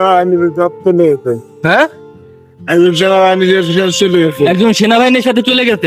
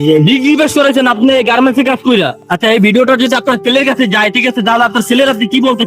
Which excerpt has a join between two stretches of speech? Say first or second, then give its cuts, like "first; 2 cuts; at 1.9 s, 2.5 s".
second; 1 cut; at 2.4 s